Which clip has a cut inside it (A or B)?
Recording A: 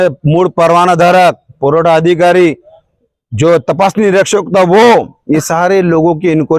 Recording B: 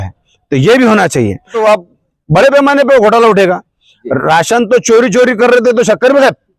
B